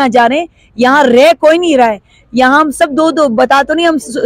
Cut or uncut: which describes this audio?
uncut